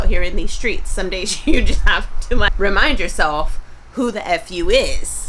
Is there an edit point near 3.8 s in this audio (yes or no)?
no